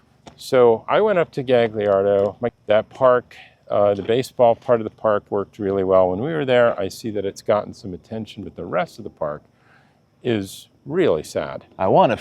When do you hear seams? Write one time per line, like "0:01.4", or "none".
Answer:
0:02.5